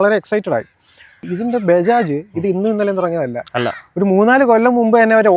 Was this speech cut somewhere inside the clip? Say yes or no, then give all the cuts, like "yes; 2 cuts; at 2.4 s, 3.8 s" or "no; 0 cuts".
yes; 1 cut; at 1.3 s